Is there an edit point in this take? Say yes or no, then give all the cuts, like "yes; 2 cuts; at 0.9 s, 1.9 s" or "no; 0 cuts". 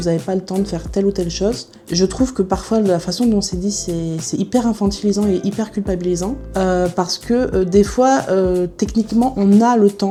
no; 0 cuts